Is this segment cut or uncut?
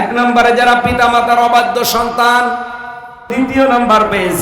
cut